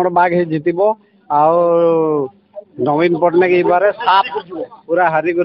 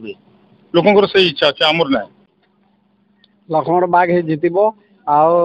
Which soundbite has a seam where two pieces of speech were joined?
second; 1 cut; at 2.2 s

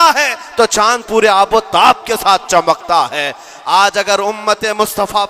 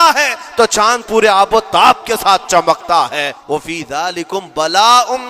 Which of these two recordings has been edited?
second; 1 cut; at 3.3 s

